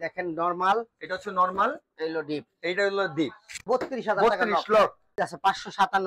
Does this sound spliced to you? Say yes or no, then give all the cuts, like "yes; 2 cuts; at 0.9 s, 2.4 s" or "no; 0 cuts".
yes; 2 cuts; at 3.6 s, 5.1 s